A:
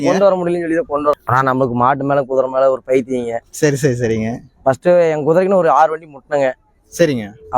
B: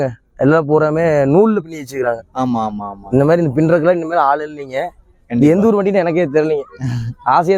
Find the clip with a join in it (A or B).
A